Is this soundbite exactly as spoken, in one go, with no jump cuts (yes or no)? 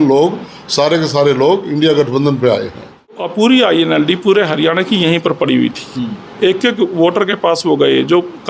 no